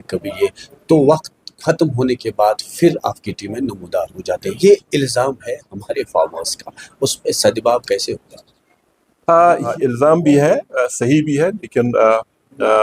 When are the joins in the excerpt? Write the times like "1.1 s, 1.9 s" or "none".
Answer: 9.7 s